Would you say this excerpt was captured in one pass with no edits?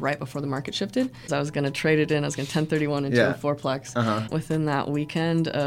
no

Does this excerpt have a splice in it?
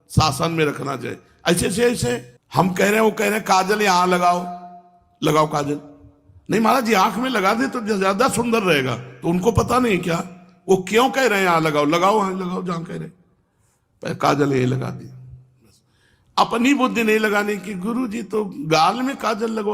yes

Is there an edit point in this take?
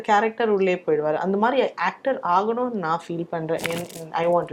no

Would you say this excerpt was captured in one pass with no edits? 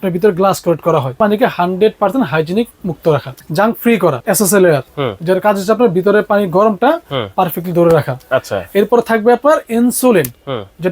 no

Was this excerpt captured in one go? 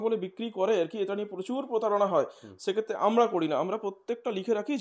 yes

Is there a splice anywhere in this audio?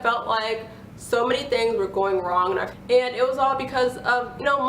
yes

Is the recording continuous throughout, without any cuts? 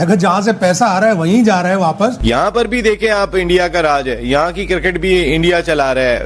yes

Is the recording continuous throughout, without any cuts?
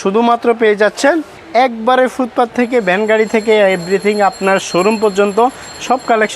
no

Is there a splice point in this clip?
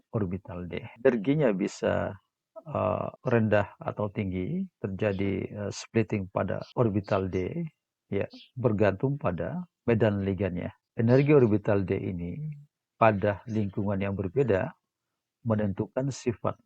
yes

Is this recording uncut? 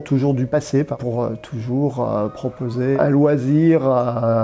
no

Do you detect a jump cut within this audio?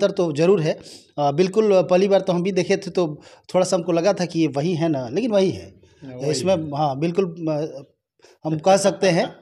no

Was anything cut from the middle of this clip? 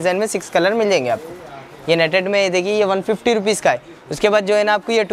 no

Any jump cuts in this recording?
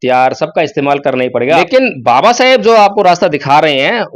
yes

